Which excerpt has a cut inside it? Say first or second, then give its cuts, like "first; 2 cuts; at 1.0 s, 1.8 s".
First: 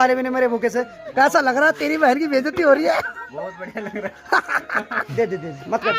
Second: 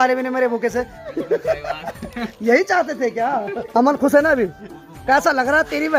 first; 2 cuts; at 1.0 s, 5.0 s